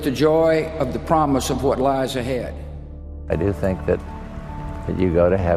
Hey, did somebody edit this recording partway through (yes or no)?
yes